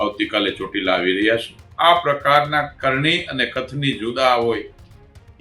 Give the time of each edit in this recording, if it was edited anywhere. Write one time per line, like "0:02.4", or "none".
0:01.6